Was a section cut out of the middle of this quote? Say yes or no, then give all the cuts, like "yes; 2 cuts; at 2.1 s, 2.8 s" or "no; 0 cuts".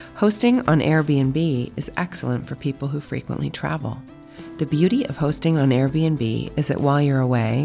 no; 0 cuts